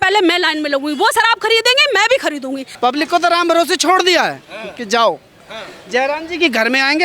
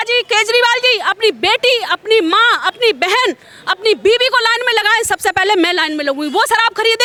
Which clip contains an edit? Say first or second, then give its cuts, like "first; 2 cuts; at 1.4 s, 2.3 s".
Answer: first; 1 cut; at 2.6 s